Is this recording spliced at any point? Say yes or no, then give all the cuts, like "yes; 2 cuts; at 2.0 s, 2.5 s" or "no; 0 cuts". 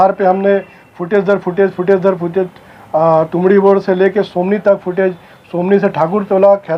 no; 0 cuts